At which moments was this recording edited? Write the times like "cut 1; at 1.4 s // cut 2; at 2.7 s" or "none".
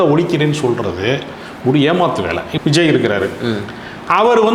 cut 1; at 2.5 s